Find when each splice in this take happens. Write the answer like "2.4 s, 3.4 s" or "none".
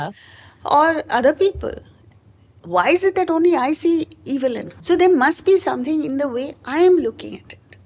4.7 s